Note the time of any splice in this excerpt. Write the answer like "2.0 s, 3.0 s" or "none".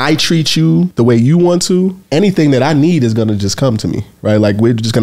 0.9 s, 2.0 s